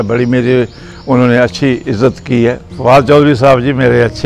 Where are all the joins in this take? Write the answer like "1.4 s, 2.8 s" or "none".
2.8 s